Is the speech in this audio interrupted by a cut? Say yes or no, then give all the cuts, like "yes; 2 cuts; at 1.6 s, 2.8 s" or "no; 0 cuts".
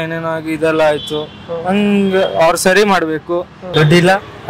yes; 1 cut; at 3.6 s